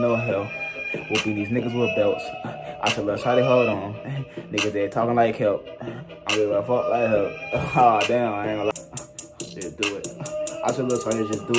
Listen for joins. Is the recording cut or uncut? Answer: cut